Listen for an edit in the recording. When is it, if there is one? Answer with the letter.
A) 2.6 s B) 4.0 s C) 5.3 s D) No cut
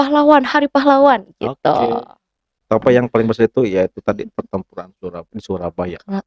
A